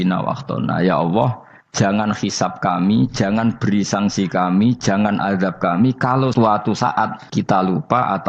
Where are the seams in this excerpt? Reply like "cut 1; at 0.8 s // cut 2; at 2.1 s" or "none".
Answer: cut 1; at 6.3 s // cut 2; at 7.2 s